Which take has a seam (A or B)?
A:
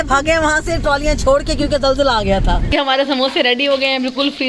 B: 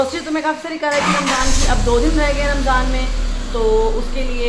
A